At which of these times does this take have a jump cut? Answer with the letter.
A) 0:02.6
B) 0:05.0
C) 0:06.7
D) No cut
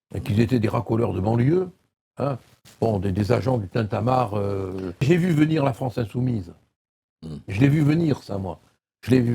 B